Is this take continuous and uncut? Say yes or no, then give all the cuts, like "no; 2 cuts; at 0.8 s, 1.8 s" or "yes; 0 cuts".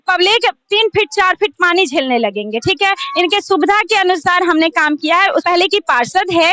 no; 1 cut; at 5.4 s